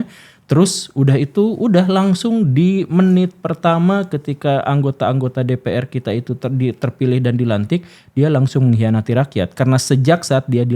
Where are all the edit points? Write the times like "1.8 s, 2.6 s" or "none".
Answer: none